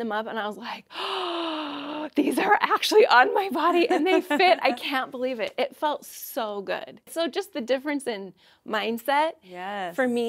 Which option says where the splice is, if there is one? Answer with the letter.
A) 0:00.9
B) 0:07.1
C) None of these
B